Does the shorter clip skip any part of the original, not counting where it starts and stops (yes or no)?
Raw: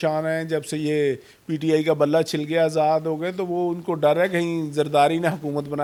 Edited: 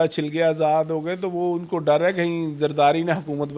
no